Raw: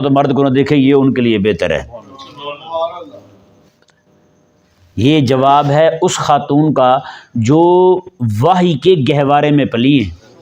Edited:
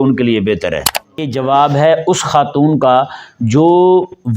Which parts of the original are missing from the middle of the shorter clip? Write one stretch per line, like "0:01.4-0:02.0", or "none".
0:02.3-0:05.3

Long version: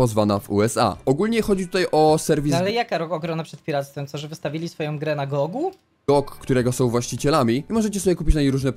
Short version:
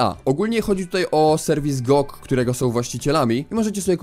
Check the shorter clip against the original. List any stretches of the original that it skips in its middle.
0:02.5-0:05.9

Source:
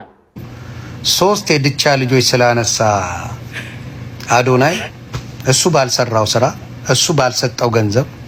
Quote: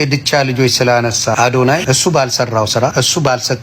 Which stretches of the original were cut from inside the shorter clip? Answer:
0:02.9-0:04.9
0:06.5-0:06.9

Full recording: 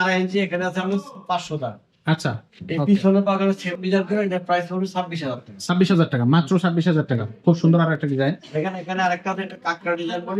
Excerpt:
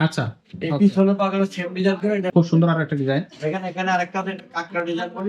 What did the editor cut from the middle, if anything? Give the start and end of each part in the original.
0:04.4-0:07.4

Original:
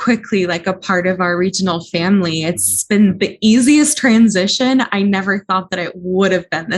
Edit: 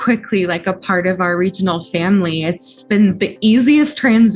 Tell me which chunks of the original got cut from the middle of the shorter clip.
none

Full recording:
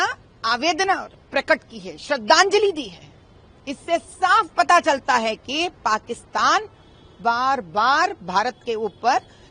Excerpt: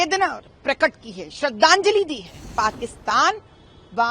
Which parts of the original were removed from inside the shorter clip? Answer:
0:03.2-0:05.8

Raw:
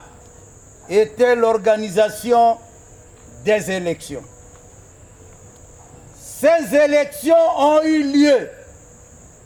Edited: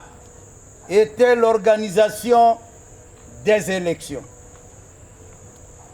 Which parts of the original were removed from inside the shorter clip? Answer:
none

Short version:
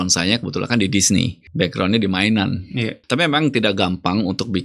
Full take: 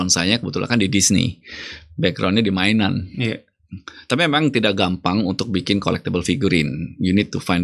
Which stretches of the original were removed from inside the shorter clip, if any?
0:01.4-0:01.8
0:03.4-0:04.0

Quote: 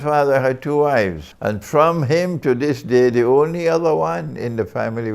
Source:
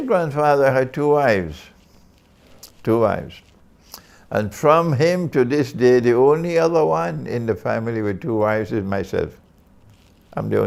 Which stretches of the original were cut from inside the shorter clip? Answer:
0:01.6-0:04.2

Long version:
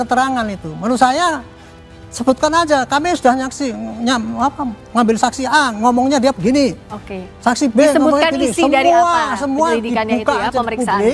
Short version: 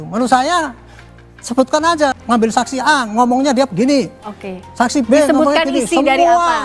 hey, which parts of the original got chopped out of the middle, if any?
0:02.9-0:04.8

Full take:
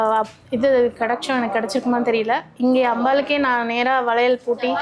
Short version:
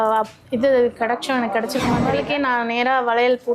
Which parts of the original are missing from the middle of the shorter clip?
0:02.1-0:03.1

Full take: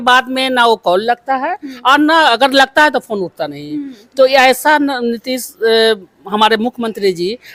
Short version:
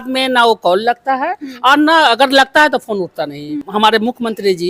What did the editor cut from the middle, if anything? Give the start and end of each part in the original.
0:03.8-0:06.1

